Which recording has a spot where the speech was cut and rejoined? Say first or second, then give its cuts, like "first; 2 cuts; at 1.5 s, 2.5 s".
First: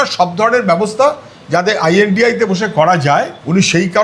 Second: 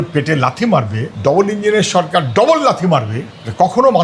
second; 1 cut; at 1.0 s